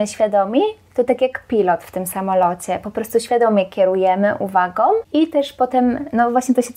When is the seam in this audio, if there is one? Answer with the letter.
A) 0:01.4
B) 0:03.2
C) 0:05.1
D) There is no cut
C